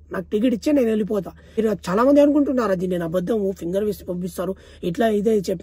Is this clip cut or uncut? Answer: cut